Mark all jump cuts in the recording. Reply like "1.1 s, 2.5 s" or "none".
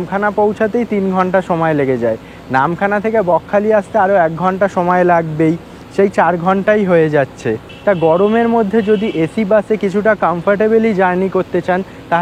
none